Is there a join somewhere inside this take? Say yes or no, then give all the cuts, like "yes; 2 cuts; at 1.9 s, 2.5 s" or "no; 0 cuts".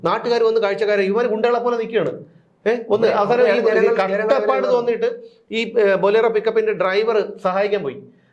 no; 0 cuts